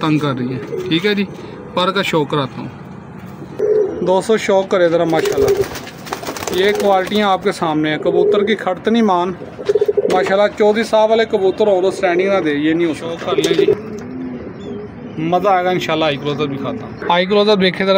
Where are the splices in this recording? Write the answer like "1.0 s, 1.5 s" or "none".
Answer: 3.6 s, 13.7 s, 16.9 s

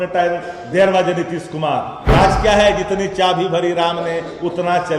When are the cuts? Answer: 2.0 s

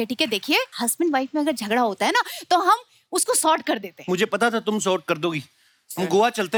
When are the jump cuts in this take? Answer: none

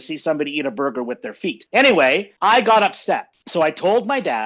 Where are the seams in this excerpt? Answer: 1.6 s, 2.3 s, 3.4 s

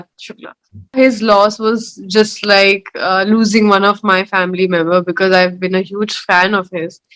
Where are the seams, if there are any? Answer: 1.0 s

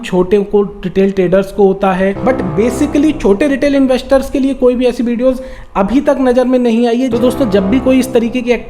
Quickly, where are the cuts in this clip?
2.2 s, 7.1 s

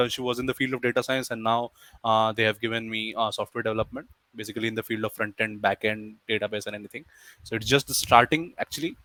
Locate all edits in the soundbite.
none

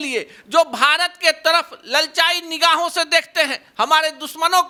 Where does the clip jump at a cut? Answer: none

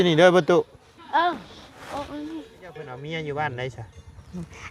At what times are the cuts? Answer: 3.0 s

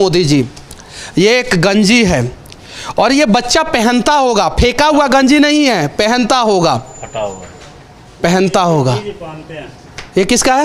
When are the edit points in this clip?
none

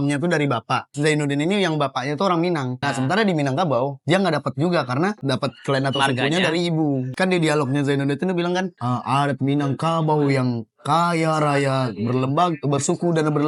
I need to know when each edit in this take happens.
0.9 s, 2.8 s, 4.0 s, 5.2 s, 7.1 s, 8.8 s

